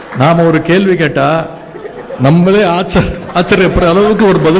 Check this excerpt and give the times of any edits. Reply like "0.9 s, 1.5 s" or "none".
none